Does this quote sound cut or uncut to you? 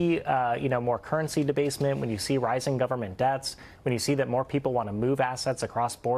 uncut